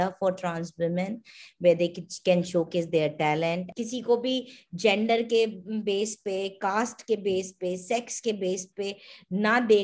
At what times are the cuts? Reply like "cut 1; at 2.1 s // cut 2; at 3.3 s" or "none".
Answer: cut 1; at 3.7 s